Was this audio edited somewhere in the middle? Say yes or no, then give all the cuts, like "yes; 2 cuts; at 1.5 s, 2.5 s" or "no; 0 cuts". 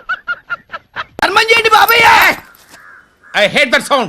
yes; 1 cut; at 1.1 s